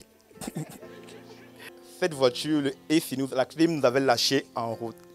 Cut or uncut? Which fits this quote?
cut